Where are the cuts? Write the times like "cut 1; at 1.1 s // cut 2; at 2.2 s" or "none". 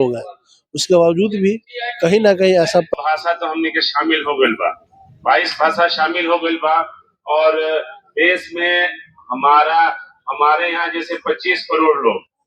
cut 1; at 2.9 s